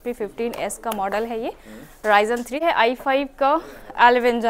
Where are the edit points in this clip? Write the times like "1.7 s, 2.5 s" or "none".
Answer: 2.6 s